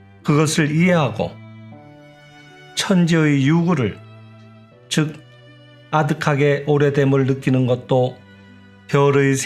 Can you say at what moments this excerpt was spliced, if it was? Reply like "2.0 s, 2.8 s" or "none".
none